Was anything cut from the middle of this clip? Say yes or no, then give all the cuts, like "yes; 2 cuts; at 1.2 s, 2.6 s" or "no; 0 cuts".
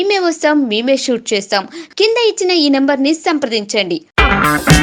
no; 0 cuts